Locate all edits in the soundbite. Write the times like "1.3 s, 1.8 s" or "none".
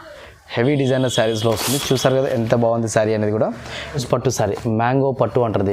4.0 s